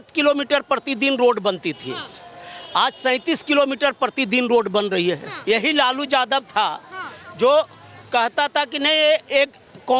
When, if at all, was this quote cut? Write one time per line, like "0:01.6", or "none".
0:05.3

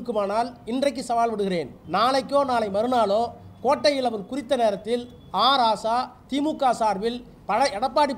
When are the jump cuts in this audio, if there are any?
0:01.8

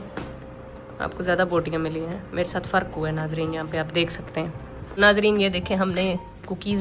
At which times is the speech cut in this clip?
0:05.0

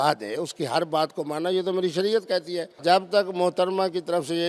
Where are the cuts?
0:02.7

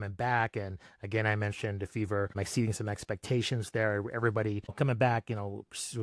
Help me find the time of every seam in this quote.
0:02.4
0:04.7

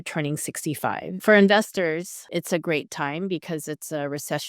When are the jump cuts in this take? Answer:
0:01.1
0:02.2

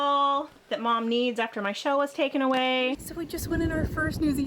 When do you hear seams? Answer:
0:03.0

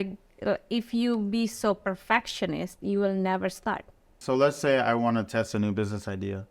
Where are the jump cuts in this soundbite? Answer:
0:04.2

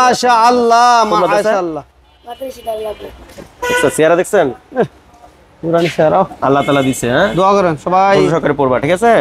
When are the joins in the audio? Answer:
none

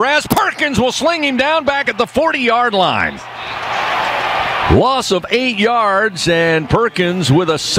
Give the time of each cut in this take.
none

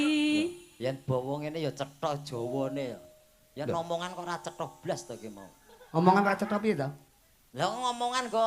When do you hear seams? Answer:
none

